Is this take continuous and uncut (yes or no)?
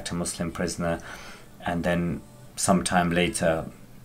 yes